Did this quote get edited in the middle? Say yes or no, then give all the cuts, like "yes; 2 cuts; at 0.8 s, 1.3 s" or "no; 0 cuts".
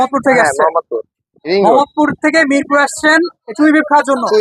no; 0 cuts